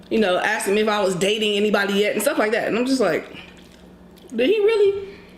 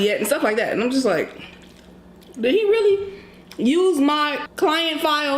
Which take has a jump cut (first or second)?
second